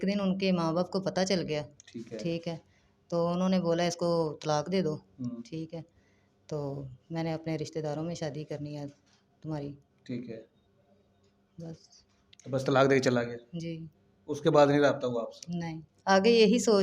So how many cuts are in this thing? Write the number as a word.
one